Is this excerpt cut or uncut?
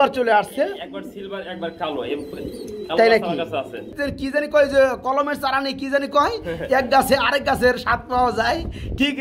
cut